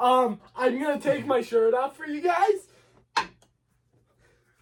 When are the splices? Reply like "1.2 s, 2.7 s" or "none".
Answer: none